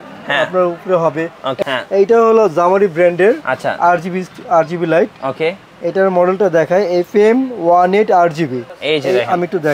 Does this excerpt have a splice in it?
yes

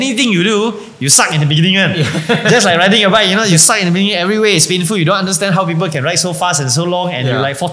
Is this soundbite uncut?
yes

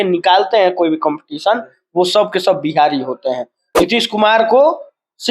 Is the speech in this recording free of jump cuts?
no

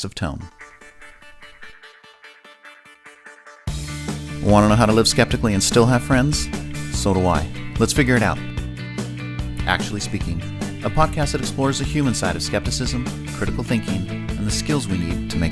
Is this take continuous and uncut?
yes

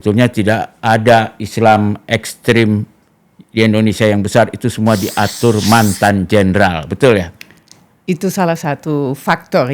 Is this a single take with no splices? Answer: yes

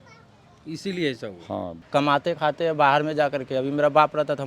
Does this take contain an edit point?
yes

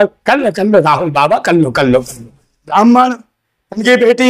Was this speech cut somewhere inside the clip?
yes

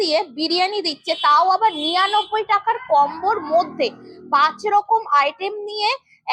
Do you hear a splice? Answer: no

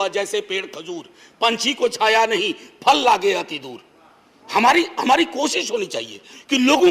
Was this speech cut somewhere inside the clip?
no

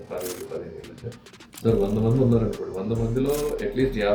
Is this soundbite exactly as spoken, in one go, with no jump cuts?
yes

